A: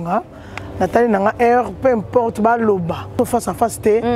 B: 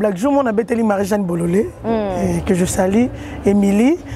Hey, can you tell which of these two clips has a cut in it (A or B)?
A